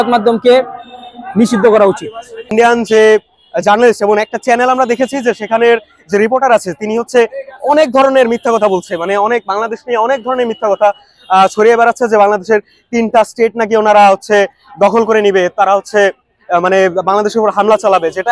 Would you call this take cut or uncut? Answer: cut